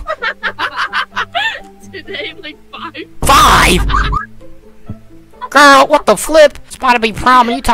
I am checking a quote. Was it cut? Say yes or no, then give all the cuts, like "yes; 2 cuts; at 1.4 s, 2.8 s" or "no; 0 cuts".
yes; 1 cut; at 6.7 s